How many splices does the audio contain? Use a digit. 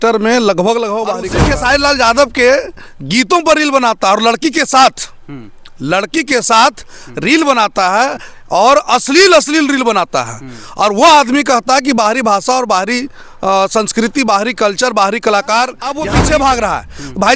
2